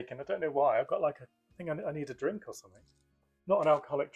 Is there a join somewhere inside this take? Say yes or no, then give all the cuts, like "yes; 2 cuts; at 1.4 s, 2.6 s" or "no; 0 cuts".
no; 0 cuts